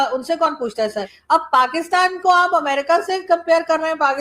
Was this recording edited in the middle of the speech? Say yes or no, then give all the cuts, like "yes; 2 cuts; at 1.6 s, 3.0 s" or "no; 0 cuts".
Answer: yes; 1 cut; at 1.1 s